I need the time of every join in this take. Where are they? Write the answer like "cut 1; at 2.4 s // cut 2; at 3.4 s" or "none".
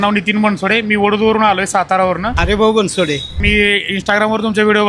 cut 1; at 2.3 s // cut 2; at 3.3 s

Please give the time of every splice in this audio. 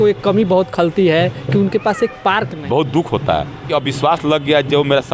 cut 1; at 2.5 s // cut 2; at 3.7 s

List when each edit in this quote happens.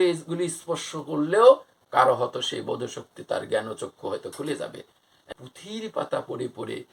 cut 1; at 5.3 s

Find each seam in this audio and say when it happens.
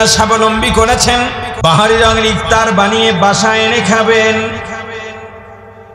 cut 1; at 1.5 s

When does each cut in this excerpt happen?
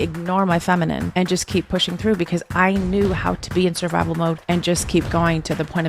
cut 1; at 1.1 s // cut 2; at 4.4 s

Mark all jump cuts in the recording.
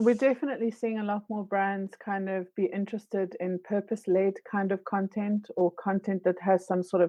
none

